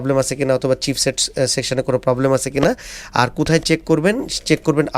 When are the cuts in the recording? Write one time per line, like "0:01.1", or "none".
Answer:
none